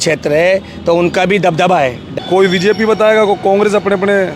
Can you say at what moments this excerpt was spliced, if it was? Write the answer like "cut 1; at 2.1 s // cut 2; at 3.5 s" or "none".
cut 1; at 2.2 s